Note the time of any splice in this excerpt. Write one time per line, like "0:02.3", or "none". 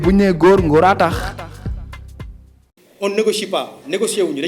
0:02.6